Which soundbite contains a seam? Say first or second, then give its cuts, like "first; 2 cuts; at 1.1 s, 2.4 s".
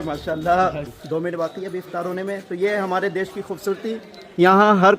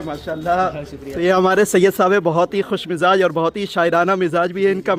first; 1 cut; at 0.9 s